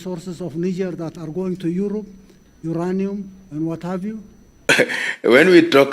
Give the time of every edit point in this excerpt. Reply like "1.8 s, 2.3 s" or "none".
4.7 s